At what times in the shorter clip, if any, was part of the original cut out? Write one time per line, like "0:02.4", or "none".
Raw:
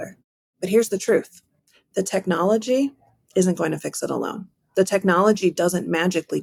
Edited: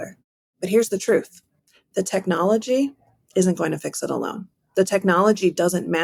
none